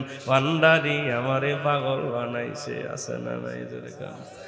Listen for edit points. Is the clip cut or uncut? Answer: uncut